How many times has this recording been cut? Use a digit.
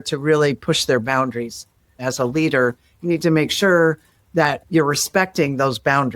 2